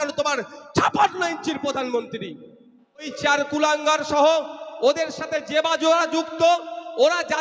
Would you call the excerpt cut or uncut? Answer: cut